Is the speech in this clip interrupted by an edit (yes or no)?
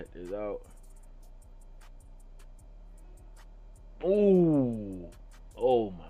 no